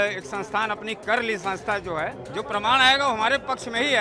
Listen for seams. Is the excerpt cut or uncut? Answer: cut